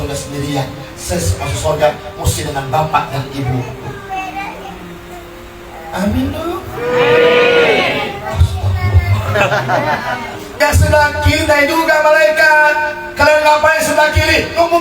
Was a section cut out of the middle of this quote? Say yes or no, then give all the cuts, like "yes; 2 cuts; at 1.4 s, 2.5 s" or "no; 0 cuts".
yes; 1 cut; at 10.5 s